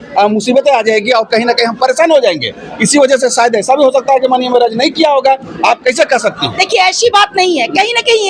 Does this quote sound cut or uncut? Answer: uncut